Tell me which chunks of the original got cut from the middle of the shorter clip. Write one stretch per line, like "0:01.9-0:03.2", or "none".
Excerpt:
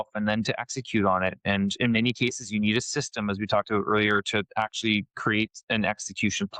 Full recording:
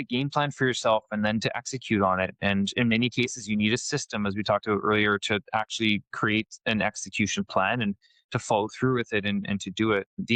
none